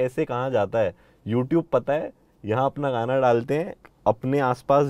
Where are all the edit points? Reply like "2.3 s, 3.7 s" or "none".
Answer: 3.9 s